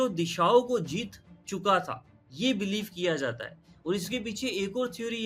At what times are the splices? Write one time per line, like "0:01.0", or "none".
none